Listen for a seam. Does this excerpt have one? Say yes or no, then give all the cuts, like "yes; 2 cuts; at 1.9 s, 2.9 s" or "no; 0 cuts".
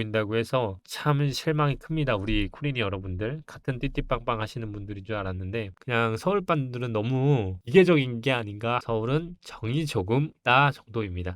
yes; 2 cuts; at 5.7 s, 8.8 s